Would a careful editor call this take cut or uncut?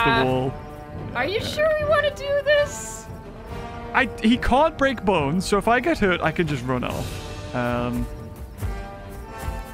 uncut